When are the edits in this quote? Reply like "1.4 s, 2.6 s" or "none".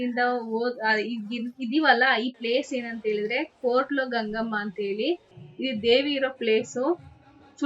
5.4 s